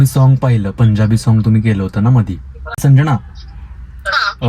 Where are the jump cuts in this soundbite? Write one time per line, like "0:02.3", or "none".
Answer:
0:02.8